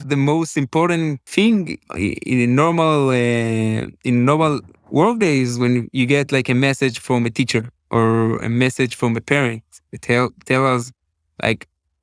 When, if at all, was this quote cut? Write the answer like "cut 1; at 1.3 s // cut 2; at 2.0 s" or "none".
cut 1; at 1.3 s